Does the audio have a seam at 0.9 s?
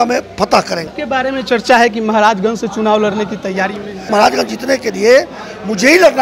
yes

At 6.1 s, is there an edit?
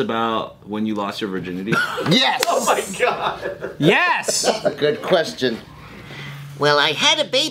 yes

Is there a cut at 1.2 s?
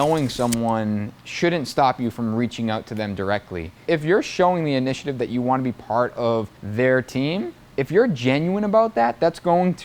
no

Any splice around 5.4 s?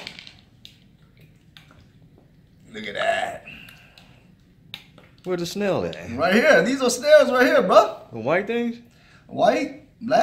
no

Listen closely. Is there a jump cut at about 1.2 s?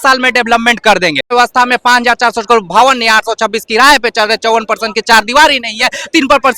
yes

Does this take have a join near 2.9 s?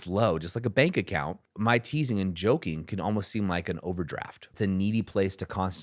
no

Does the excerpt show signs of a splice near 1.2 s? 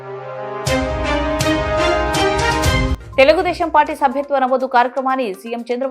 no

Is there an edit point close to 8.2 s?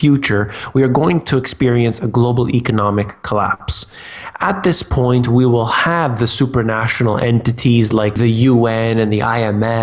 yes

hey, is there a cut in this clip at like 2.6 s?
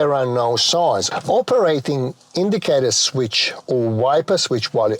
no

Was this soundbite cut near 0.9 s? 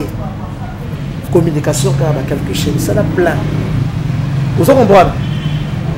no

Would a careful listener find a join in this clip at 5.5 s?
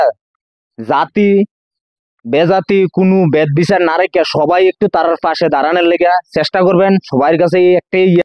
no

